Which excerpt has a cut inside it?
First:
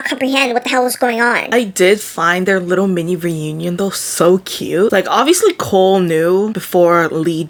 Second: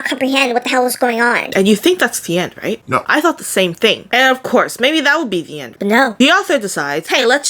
second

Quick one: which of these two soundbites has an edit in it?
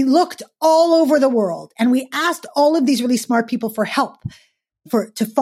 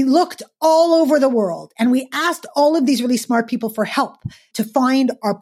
second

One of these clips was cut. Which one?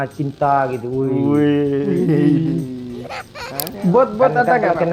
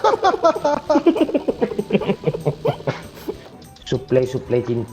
second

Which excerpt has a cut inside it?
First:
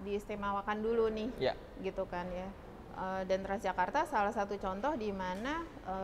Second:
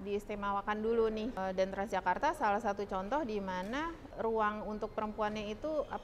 second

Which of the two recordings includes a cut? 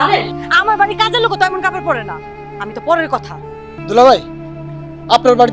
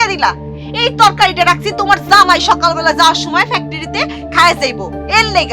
first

